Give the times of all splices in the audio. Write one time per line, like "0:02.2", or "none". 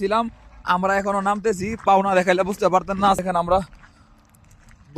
0:03.2